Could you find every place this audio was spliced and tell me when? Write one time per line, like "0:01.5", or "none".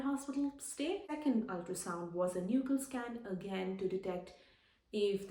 0:01.1